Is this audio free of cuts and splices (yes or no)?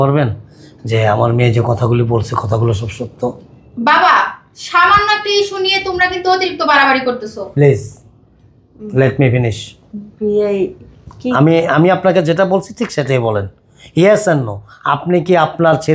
yes